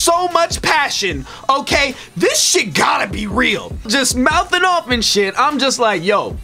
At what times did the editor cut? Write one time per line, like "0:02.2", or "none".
0:03.9

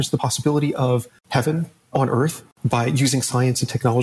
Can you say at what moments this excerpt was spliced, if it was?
0:01.2
0:02.5

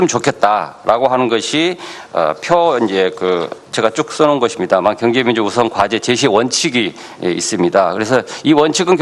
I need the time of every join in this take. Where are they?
0:04.5

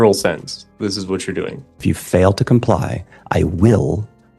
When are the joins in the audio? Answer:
0:01.8

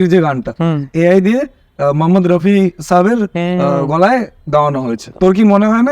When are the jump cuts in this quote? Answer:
0:00.9
0:05.0

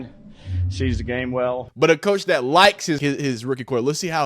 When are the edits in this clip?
0:01.7
0:03.0

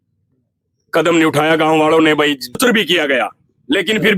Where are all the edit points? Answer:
0:02.6

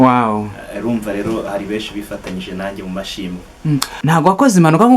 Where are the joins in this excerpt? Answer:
0:04.0

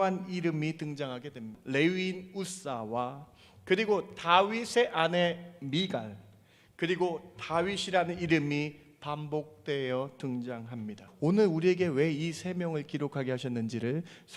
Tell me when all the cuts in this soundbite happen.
0:01.5
0:11.0

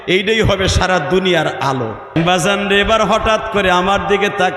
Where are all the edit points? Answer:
0:02.1

